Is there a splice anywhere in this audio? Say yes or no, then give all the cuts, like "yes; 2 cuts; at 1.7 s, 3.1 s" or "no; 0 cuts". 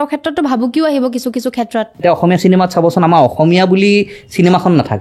yes; 1 cut; at 1.9 s